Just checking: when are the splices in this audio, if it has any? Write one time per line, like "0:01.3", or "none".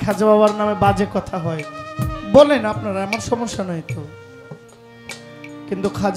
none